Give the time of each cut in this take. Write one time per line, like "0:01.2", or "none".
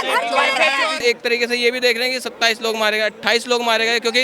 0:01.0